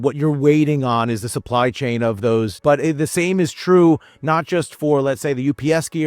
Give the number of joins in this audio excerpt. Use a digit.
1